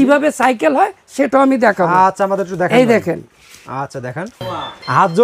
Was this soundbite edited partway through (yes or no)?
no